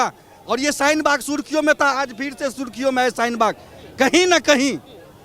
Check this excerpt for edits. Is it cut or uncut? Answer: uncut